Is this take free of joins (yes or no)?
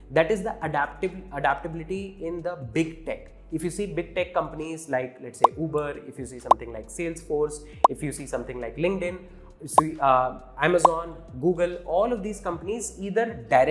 yes